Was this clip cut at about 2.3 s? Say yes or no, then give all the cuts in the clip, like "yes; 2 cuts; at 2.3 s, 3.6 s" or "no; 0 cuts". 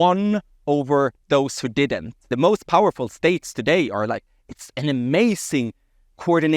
yes; 1 cut; at 2.3 s